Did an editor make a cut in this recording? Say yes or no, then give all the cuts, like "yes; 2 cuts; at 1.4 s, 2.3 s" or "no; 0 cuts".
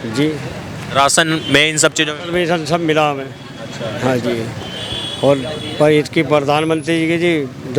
no; 0 cuts